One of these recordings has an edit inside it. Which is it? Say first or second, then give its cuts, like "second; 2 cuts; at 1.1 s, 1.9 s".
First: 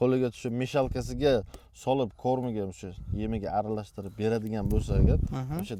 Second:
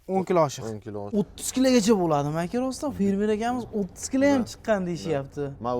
second; 1 cut; at 1.0 s